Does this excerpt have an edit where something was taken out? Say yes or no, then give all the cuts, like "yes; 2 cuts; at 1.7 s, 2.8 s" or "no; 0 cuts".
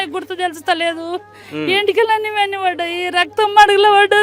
no; 0 cuts